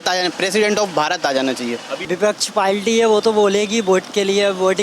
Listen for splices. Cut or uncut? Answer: cut